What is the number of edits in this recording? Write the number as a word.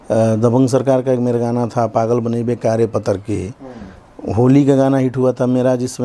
zero